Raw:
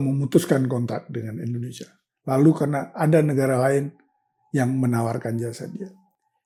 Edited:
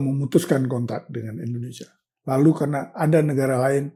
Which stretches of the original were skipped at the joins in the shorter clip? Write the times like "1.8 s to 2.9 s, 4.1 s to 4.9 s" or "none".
none